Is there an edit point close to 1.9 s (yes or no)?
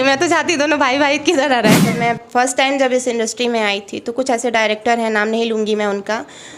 yes